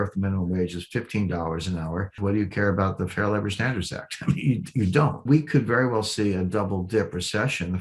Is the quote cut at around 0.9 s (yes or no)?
no